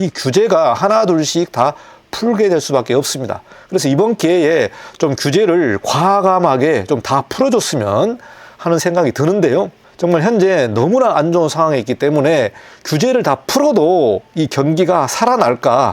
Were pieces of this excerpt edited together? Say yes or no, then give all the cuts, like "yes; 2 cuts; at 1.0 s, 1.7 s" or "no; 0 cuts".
no; 0 cuts